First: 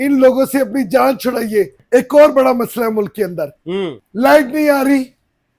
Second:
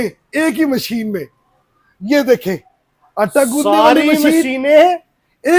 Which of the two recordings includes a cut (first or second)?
first